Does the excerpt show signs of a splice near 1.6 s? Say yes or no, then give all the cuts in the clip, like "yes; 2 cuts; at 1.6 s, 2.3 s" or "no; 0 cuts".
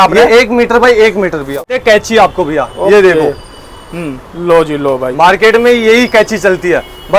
yes; 1 cut; at 1.6 s